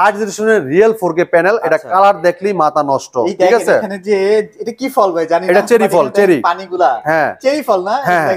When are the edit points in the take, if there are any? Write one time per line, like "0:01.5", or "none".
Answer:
none